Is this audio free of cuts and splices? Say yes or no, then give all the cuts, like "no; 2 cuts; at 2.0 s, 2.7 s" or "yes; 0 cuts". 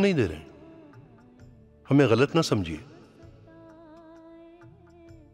yes; 0 cuts